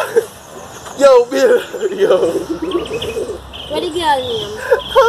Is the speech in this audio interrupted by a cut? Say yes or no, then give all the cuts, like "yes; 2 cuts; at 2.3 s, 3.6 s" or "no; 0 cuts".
no; 0 cuts